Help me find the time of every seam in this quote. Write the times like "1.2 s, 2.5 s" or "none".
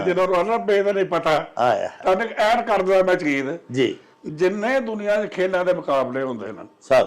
none